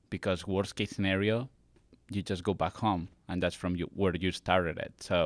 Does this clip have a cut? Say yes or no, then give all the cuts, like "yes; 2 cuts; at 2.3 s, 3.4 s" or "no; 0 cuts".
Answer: no; 0 cuts